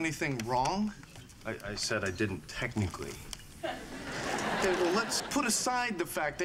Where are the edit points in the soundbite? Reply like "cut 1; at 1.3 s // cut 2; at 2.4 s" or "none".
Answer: cut 1; at 5.2 s